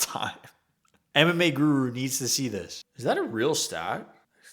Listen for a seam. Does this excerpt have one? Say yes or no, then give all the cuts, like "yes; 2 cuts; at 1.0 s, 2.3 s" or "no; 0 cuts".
yes; 1 cut; at 2.7 s